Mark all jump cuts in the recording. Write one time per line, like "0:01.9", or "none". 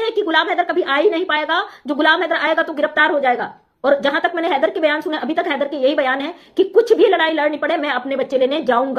none